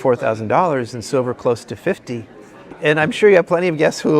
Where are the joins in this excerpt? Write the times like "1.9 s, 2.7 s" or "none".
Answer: 2.7 s